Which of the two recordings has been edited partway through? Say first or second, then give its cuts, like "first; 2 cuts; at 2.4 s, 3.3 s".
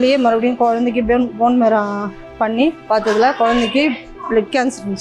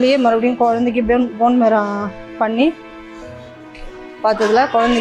first; 1 cut; at 2.8 s